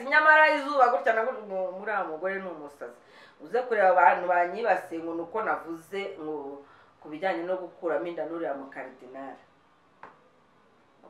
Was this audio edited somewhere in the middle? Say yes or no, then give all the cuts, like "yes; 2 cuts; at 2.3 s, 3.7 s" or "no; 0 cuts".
no; 0 cuts